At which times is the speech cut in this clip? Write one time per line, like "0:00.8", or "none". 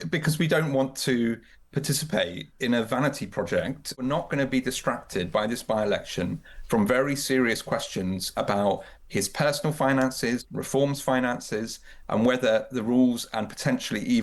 0:03.9